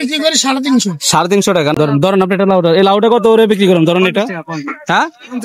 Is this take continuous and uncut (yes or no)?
no